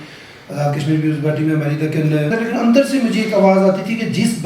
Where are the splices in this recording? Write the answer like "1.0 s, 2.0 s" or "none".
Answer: 2.3 s